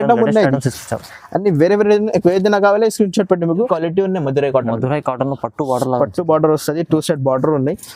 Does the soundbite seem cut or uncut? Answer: cut